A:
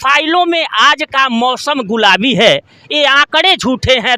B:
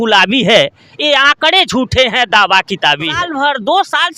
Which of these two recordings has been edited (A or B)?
B